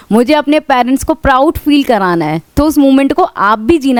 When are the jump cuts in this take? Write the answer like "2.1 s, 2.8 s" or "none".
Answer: none